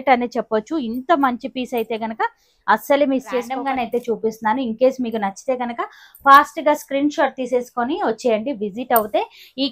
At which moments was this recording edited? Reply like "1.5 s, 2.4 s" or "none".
3.6 s